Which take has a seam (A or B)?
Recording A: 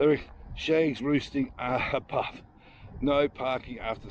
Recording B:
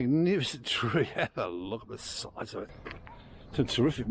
B